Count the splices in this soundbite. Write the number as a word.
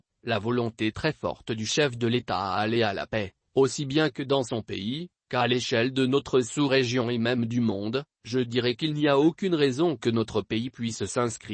zero